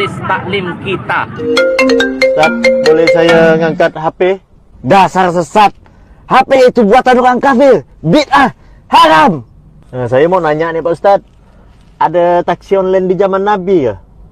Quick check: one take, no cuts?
no; 1 cut; at 1.4 s

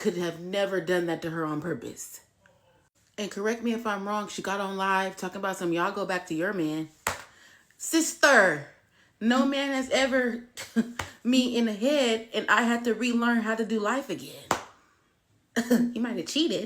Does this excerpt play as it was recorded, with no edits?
no; 1 cut; at 1.6 s

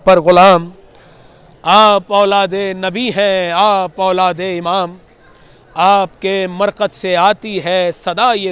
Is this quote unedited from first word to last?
yes; 0 cuts

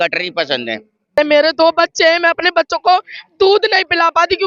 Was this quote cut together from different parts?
yes; 1 cut; at 1.2 s

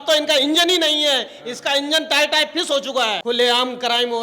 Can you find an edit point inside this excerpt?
yes; 1 cut; at 3.2 s

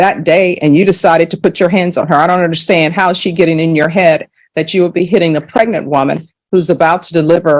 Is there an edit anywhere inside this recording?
no; 0 cuts

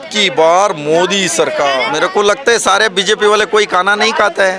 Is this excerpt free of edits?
no; 1 cut; at 1.8 s

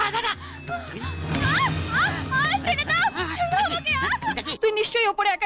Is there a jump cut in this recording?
yes; 1 cut; at 4.5 s

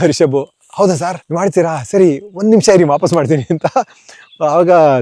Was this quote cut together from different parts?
yes; 1 cut; at 1.2 s

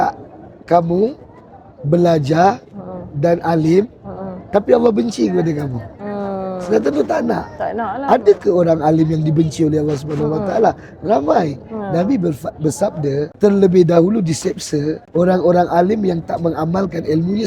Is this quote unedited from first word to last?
no; 2 cuts; at 13.3 s, 15.0 s

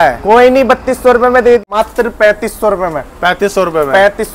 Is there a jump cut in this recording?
yes; 1 cut; at 1.6 s

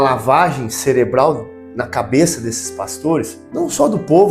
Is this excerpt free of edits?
no; 1 cut; at 3.4 s

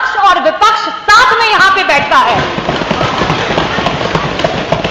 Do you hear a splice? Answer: no; 0 cuts

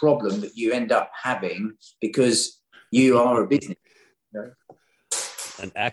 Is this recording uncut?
yes; 0 cuts

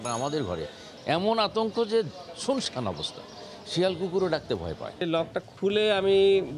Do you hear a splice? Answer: yes; 2 cuts; at 0.9 s, 5.0 s

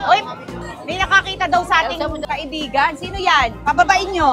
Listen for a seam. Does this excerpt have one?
no; 0 cuts

